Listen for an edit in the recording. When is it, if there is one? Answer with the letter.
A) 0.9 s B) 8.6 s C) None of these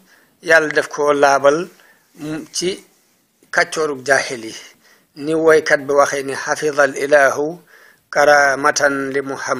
A